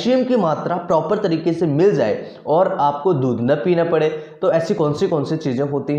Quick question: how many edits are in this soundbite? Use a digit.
0